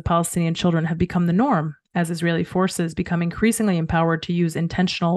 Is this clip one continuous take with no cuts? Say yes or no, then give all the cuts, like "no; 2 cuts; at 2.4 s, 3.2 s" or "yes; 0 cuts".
yes; 0 cuts